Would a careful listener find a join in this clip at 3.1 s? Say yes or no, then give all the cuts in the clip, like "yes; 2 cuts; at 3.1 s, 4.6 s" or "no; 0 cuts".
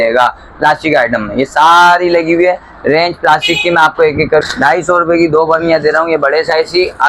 no; 1 cut; at 4.4 s